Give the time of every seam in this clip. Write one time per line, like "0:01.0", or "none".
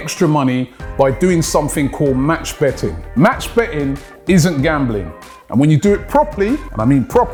none